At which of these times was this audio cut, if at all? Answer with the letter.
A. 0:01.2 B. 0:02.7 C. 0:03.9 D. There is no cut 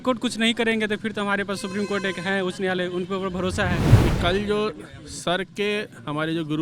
C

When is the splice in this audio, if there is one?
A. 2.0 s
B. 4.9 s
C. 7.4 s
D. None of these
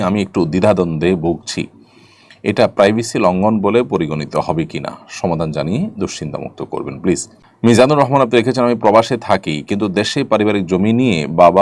C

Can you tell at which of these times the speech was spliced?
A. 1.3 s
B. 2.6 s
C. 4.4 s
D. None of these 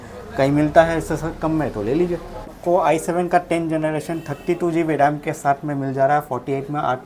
B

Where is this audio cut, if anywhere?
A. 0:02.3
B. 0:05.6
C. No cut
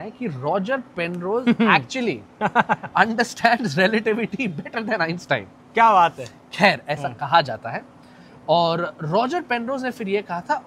C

